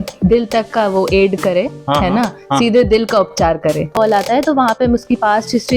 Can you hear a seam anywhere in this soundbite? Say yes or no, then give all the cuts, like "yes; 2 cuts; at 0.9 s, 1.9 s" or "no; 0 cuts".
yes; 1 cut; at 3.9 s